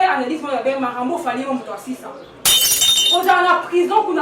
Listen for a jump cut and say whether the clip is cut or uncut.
cut